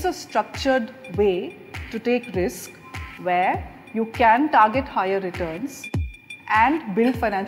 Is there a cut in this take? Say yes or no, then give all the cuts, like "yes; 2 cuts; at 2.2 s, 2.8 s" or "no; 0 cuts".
no; 0 cuts